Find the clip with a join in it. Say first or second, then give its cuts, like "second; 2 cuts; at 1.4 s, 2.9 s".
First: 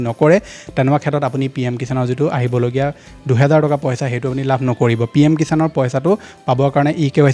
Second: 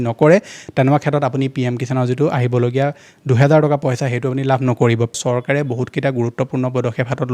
second; 1 cut; at 5.1 s